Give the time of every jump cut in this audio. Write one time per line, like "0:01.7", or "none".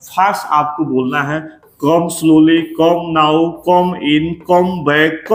none